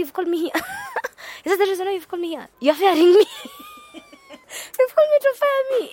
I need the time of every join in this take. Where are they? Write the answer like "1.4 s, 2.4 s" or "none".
none